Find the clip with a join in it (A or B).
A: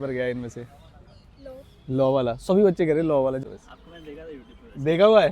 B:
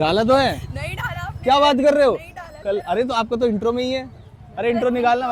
A